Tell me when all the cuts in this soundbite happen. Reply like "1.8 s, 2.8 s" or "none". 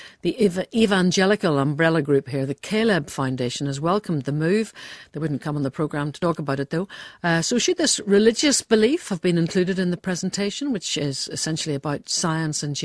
8.1 s